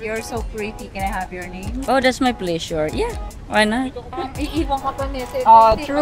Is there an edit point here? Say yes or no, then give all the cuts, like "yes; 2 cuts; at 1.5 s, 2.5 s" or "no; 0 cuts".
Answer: yes; 1 cut; at 4.2 s